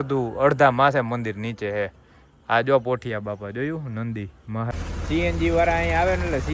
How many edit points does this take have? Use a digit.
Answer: 1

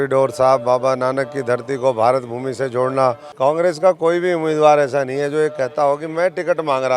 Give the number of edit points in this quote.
1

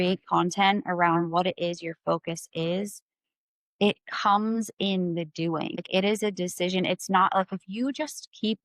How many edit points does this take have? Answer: 1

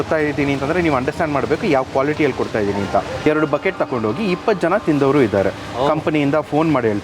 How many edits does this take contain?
1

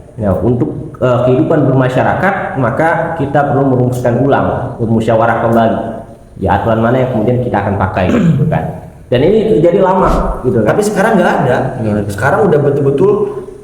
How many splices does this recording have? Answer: 1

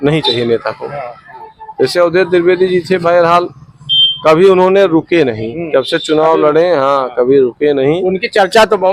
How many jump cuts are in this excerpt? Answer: 0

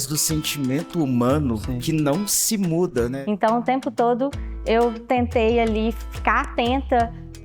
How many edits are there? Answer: 1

